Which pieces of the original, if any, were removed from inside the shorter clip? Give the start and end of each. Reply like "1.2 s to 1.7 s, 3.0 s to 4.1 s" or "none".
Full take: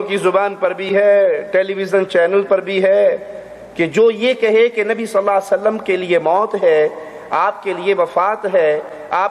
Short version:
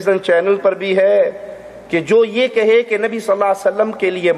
none